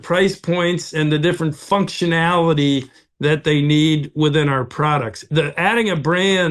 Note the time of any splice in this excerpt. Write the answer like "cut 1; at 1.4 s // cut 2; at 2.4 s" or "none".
cut 1; at 5.3 s